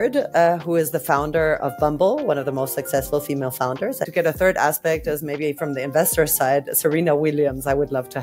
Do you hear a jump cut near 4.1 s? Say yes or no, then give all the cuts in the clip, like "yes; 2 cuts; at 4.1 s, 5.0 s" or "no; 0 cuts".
yes; 1 cut; at 4.1 s